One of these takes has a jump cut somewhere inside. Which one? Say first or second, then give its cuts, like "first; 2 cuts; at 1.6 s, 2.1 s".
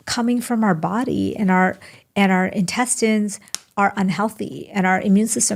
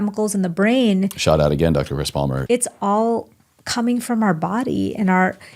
second; 1 cut; at 2.4 s